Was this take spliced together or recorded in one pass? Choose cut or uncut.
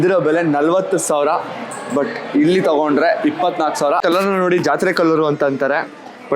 cut